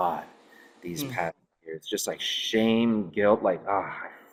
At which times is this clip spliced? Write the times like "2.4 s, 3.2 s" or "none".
none